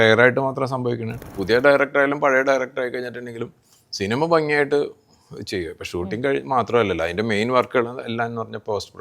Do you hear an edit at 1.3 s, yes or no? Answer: yes